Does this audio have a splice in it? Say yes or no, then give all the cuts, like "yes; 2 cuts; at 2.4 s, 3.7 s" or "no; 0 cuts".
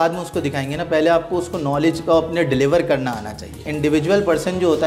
yes; 1 cut; at 3.7 s